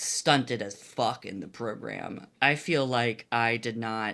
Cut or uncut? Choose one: uncut